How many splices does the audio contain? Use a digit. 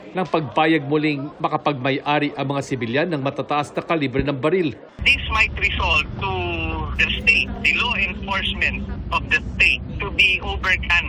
1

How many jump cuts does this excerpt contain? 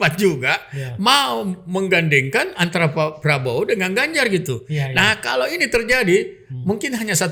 0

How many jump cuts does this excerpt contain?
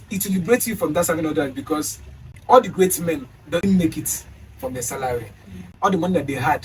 3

